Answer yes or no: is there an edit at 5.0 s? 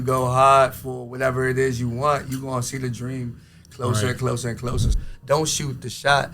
yes